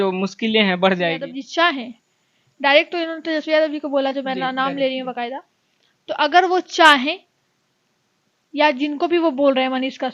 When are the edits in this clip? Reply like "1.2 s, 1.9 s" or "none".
1.4 s